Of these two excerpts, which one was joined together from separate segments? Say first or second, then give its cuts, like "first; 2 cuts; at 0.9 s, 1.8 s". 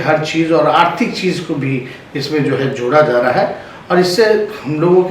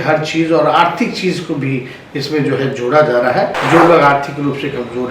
second; 1 cut; at 3.6 s